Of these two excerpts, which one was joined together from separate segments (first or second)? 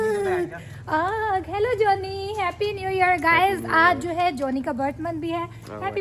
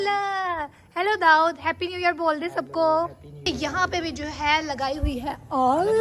second